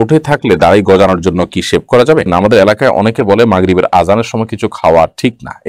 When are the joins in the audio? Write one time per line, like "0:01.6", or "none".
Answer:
0:02.3